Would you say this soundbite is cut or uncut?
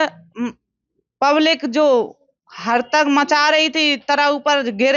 uncut